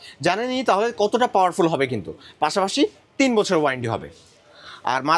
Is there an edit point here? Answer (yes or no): no